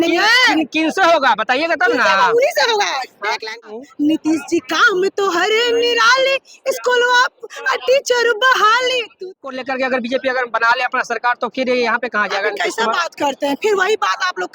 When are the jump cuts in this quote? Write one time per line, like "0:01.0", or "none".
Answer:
0:03.6
0:09.3